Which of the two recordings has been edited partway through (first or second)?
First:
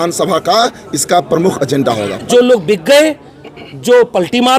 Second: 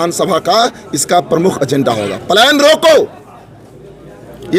first